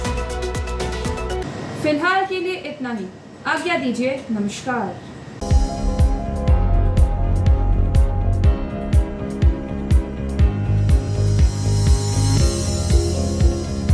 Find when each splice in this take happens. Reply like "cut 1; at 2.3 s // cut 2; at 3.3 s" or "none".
none